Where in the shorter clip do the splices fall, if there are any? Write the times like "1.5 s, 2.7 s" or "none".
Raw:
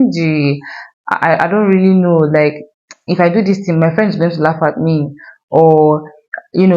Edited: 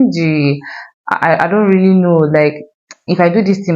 none